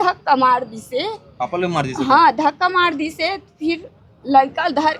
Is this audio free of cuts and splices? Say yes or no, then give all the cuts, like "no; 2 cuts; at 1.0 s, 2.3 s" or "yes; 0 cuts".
yes; 0 cuts